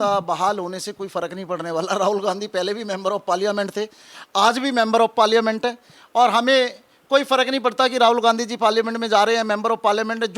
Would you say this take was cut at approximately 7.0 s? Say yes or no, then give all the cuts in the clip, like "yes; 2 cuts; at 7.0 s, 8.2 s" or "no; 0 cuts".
no; 0 cuts